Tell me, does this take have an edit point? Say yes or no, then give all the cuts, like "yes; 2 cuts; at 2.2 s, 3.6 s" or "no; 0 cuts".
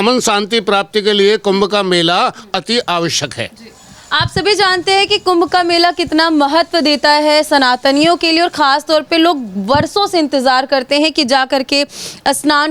no; 0 cuts